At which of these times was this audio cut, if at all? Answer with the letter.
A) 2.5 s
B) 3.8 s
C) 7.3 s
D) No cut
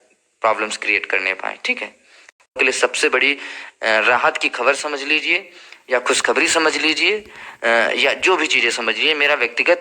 A